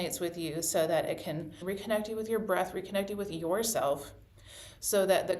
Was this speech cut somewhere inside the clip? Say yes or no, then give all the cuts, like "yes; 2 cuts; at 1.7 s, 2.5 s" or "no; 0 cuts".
yes; 1 cut; at 1.6 s